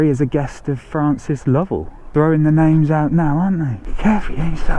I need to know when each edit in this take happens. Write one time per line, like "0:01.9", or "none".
0:02.0
0:03.8